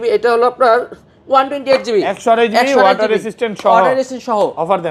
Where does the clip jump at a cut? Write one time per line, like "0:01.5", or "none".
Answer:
none